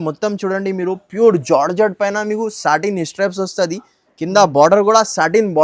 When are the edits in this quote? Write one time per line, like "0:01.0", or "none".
none